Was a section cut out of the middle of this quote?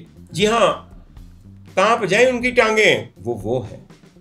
yes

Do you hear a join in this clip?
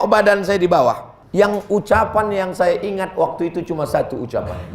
yes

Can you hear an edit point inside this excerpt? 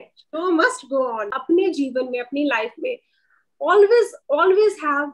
yes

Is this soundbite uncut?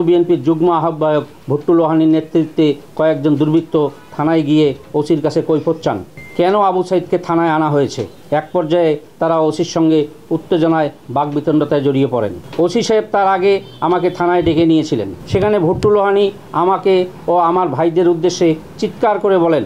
yes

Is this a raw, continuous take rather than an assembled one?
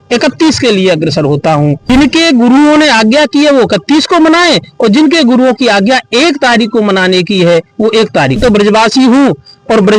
no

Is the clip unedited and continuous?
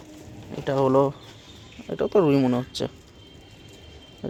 yes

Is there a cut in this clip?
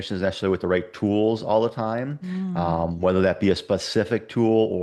no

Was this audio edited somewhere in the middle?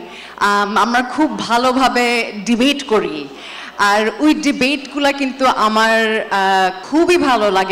yes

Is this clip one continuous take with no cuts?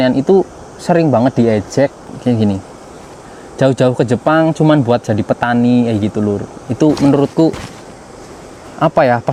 yes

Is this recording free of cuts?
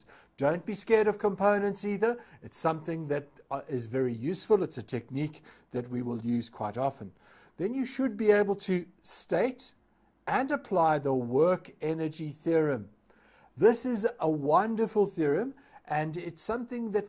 yes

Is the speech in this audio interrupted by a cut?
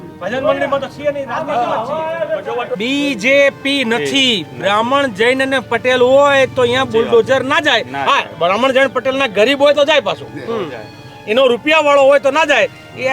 yes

